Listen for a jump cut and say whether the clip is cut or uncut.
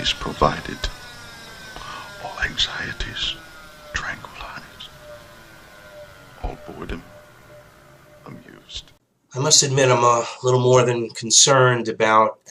cut